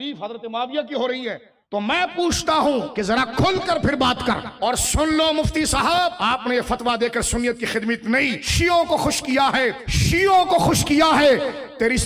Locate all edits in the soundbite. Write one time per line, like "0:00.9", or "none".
0:01.5
0:02.9
0:04.5
0:06.2
0:08.4
0:09.9